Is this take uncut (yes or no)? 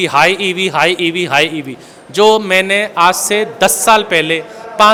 yes